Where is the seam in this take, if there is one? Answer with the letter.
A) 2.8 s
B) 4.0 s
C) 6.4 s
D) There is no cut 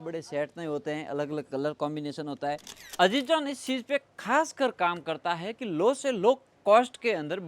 A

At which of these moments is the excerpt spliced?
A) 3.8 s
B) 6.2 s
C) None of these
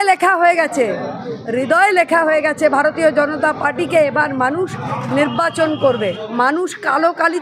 B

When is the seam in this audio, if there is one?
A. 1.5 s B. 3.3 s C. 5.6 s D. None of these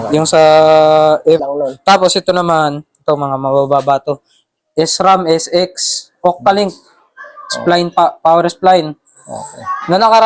A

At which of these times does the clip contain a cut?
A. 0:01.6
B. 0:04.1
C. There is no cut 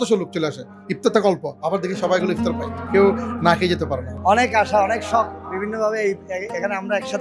B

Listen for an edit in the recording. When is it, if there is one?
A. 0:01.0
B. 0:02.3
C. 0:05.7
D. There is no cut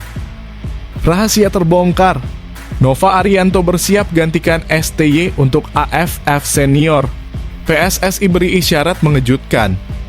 A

